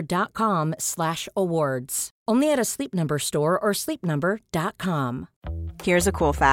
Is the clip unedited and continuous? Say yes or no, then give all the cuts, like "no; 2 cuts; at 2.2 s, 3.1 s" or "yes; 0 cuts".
no; 1 cut; at 5.4 s